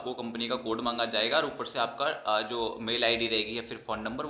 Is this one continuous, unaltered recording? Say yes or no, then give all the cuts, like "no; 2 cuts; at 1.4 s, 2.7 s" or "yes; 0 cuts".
yes; 0 cuts